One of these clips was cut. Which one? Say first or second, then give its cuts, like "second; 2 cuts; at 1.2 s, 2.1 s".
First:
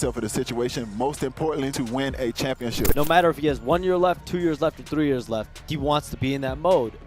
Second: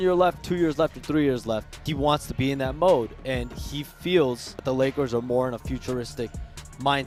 first; 1 cut; at 2.9 s